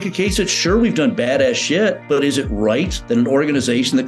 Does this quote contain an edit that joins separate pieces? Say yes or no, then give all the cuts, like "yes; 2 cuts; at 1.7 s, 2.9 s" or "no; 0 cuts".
yes; 2 cuts; at 2.0 s, 3.0 s